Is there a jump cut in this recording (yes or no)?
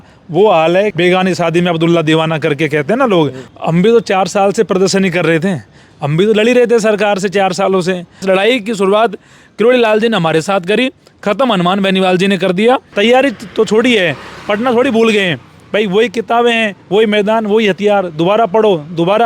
yes